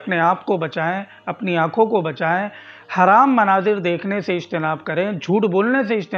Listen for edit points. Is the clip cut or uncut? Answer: uncut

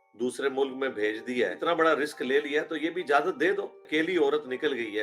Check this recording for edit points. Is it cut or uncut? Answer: cut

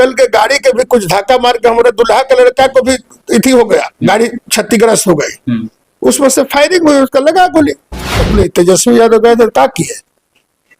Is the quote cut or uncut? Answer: cut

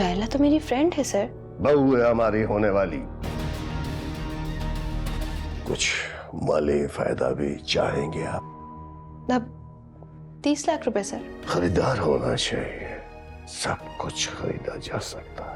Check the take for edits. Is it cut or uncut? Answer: cut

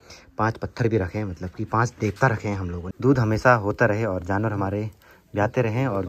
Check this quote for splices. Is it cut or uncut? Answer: cut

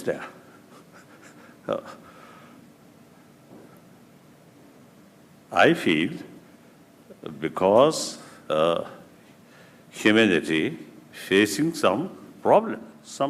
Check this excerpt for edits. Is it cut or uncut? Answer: cut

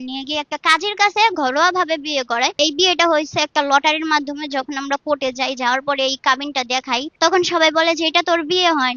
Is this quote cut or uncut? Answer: cut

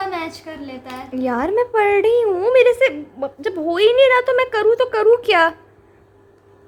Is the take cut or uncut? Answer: uncut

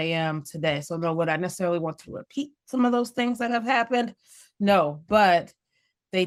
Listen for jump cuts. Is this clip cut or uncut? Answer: uncut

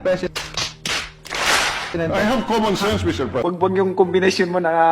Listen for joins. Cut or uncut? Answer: cut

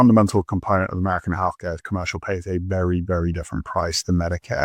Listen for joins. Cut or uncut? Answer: cut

